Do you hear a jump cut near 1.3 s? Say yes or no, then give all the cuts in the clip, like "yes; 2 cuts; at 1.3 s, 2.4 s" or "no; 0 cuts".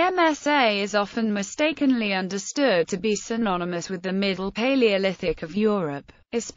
no; 1 cut; at 5.6 s